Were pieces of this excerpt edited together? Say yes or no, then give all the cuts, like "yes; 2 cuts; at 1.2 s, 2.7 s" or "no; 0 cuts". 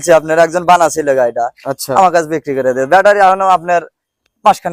no; 0 cuts